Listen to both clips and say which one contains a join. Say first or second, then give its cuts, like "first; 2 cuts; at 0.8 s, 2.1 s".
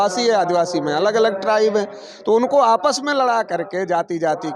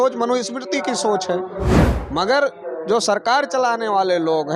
second; 1 cut; at 1.9 s